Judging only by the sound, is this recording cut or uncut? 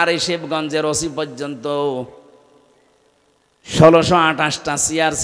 uncut